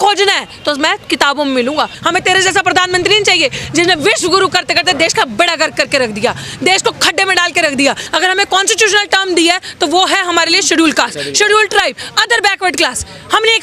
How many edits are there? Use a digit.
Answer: 2